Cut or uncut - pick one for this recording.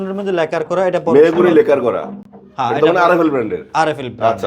uncut